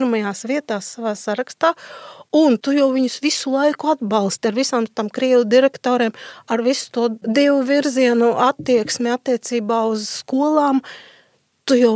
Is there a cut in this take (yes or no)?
yes